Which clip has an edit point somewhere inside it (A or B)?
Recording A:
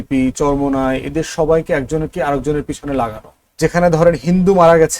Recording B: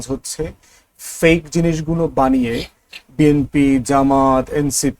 A